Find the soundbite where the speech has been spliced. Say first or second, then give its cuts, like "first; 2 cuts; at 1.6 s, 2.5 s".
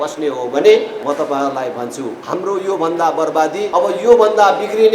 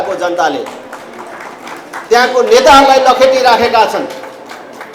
first; 3 cuts; at 1.0 s, 2.2 s, 3.7 s